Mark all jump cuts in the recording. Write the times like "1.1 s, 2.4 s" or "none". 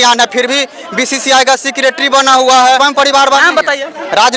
2.8 s